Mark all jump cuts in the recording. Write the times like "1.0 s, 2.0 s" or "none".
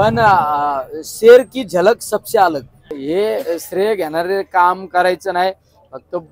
3.0 s